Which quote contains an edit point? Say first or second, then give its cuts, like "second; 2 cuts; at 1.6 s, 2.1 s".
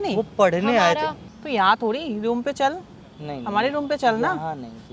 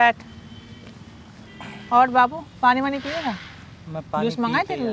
first; 1 cut; at 1.3 s